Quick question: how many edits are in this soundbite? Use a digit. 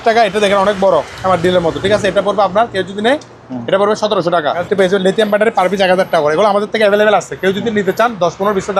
1